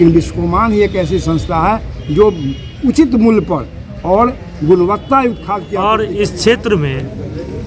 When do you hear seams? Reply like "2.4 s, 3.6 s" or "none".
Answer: 5.7 s